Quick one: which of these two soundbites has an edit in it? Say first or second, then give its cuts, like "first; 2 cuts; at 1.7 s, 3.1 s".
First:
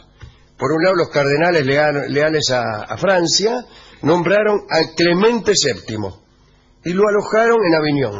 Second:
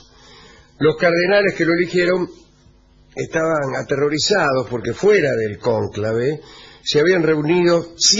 second; 1 cut; at 3.9 s